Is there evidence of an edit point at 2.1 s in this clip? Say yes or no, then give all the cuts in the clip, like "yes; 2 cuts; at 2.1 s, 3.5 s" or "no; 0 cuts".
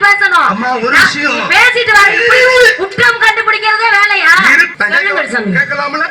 no; 1 cut; at 4.7 s